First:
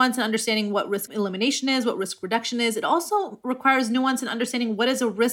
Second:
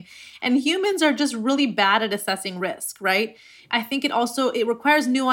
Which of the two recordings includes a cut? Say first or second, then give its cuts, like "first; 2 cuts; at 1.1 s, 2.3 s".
first; 1 cut; at 1.1 s